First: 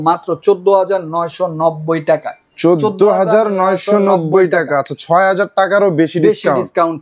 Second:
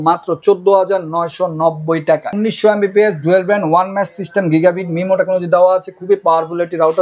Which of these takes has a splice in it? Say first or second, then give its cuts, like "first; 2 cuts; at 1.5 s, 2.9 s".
second; 1 cut; at 2.3 s